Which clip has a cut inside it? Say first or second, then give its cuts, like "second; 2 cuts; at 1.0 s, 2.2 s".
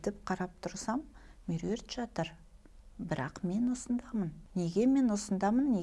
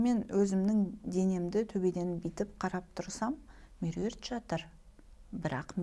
first; 1 cut; at 4.4 s